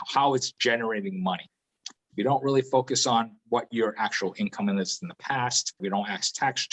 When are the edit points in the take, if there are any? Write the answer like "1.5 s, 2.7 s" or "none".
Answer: 5.8 s